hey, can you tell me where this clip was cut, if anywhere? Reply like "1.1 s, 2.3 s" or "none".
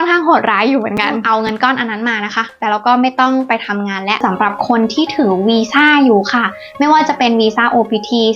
1.2 s, 4.2 s